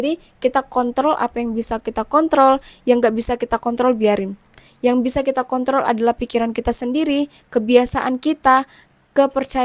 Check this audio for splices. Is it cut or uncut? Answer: uncut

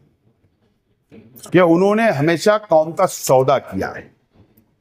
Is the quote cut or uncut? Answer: uncut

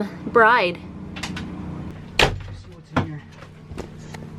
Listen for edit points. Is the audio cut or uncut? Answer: cut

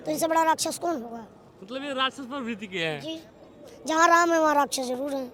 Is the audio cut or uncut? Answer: uncut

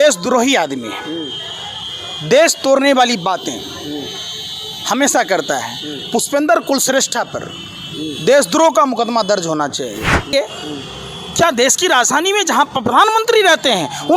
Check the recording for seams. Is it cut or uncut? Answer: cut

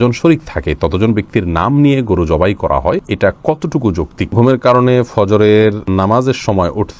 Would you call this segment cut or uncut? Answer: cut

